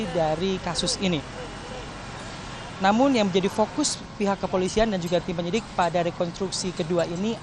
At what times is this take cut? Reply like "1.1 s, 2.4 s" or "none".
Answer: none